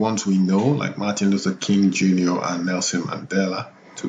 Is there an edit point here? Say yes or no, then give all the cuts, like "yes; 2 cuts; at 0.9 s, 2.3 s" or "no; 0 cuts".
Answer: no; 0 cuts